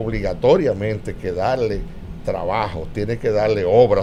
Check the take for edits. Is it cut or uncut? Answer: uncut